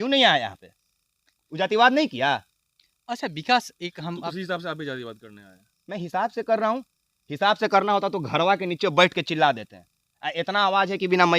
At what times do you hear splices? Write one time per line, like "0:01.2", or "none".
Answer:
none